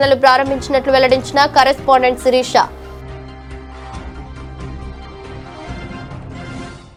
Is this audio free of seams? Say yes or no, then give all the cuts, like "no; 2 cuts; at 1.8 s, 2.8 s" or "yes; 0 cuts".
yes; 0 cuts